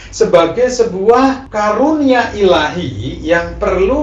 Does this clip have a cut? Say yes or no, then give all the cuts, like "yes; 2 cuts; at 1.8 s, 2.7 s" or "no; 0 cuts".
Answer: no; 0 cuts